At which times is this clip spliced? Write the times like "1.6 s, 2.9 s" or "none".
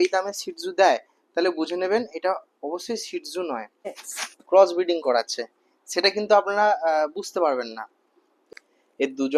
3.9 s, 8.4 s